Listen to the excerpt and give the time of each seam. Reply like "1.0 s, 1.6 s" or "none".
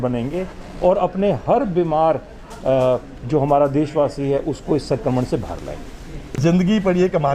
6.2 s